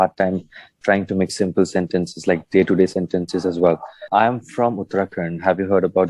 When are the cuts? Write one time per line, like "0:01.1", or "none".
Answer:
0:04.0